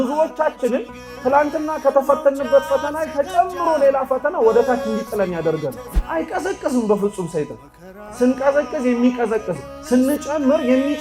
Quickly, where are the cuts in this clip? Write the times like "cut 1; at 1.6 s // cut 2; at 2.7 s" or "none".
cut 1; at 5.9 s